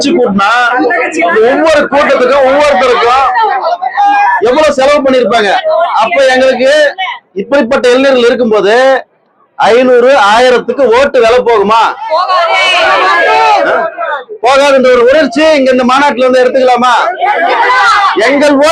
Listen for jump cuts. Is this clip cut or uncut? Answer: uncut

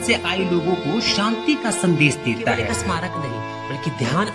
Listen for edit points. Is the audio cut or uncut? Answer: cut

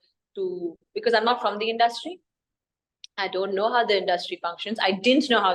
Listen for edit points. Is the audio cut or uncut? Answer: uncut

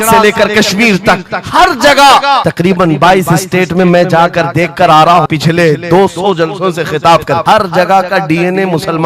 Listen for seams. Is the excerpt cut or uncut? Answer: cut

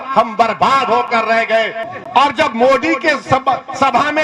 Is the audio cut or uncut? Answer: cut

